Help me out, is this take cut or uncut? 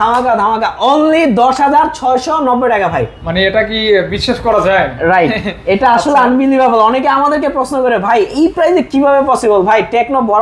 uncut